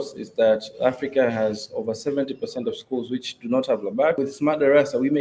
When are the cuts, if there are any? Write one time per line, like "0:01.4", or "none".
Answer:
0:04.2